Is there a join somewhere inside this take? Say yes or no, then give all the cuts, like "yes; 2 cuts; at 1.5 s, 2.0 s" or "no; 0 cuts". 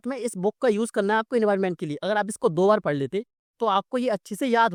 no; 0 cuts